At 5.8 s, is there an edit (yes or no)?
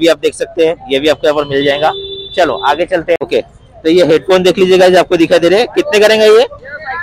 no